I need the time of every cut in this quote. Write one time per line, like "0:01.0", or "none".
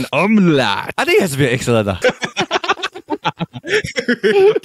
0:00.9
0:02.0

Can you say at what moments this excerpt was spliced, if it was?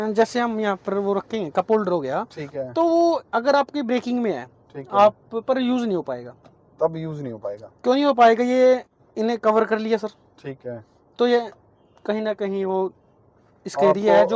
none

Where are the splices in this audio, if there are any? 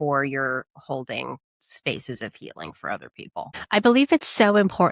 0:03.6

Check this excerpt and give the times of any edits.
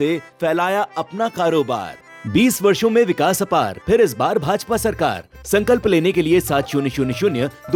none

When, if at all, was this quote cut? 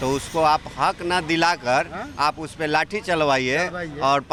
none

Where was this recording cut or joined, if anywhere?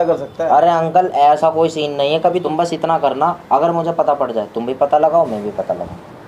0:02.4

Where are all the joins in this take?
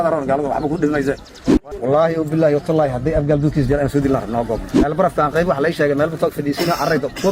0:01.3
0:04.9

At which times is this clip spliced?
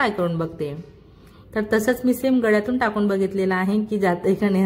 none

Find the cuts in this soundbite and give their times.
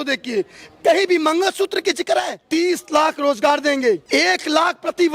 0:02.4
0:04.0

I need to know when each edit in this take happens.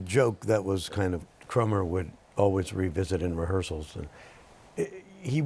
0:01.3

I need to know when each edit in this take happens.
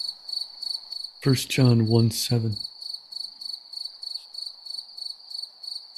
0:01.1
0:02.7

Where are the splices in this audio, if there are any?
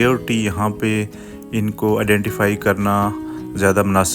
none

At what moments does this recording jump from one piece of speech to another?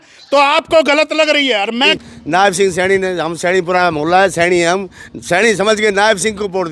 0:01.9

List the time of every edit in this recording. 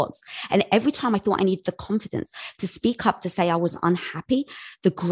none

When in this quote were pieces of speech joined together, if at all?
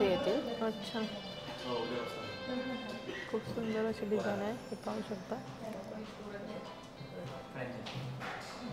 none

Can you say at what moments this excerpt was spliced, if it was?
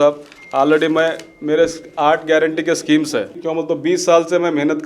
0:03.4

